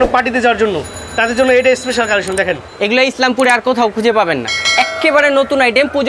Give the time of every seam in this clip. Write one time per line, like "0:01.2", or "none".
0:02.6